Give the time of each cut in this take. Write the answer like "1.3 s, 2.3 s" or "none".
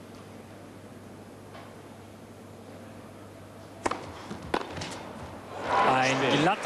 3.6 s